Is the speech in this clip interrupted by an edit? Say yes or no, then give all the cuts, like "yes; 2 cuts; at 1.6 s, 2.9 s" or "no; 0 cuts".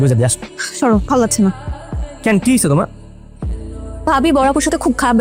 no; 0 cuts